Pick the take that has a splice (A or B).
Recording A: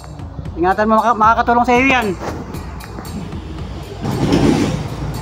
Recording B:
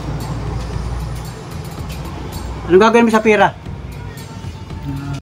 A